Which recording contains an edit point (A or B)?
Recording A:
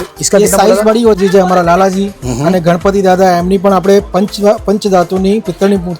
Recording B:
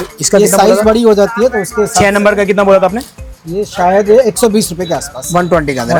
A